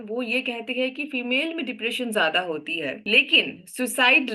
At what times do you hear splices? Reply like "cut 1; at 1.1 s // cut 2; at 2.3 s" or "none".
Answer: cut 1; at 3.0 s